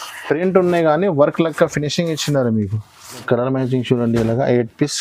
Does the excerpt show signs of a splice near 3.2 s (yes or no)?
yes